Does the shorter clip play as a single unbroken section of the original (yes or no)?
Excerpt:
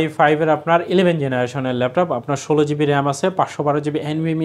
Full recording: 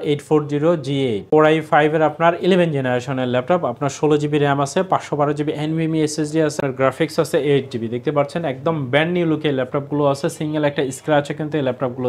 yes